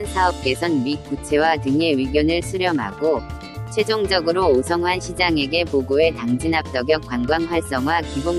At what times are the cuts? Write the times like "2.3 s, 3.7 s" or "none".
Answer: none